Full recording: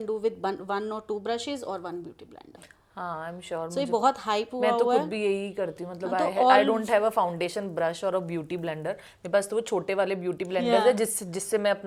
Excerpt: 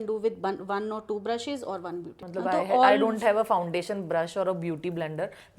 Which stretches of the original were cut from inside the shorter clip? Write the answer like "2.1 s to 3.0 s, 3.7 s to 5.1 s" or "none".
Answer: 2.2 s to 5.9 s